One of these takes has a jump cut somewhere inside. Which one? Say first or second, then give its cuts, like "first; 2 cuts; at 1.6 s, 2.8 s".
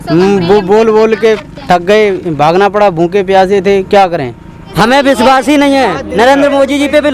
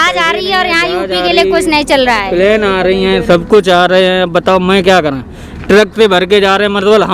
first; 1 cut; at 4.6 s